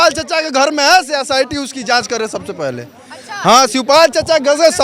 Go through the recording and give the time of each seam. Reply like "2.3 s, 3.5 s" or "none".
none